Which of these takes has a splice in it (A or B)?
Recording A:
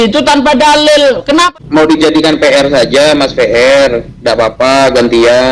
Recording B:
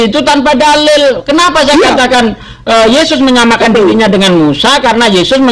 A